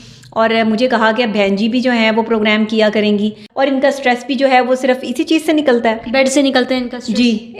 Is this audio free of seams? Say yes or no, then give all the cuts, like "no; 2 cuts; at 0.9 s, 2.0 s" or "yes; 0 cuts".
no; 1 cut; at 3.4 s